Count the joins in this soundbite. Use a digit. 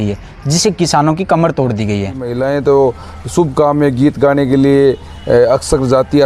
1